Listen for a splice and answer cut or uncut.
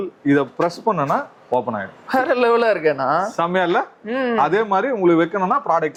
uncut